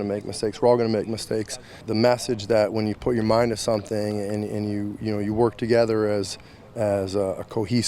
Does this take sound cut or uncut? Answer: cut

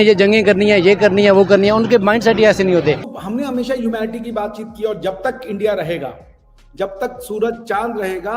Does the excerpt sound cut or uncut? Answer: cut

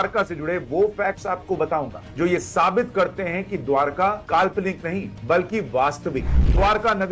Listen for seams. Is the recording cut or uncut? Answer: uncut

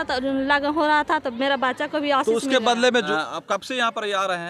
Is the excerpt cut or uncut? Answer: cut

